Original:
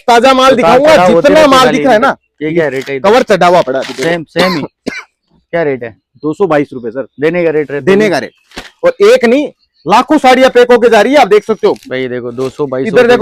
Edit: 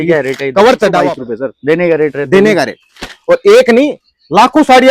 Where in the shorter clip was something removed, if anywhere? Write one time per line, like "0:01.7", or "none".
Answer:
0:01.0